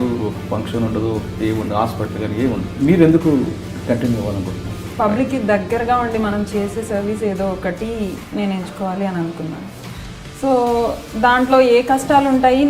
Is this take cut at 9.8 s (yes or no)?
no